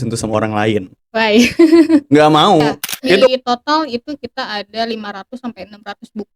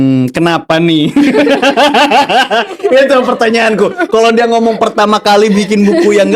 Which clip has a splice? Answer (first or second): first